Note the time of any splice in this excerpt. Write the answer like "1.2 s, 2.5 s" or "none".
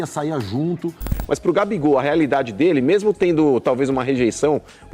1.1 s